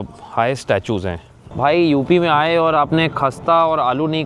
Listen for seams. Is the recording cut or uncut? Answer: cut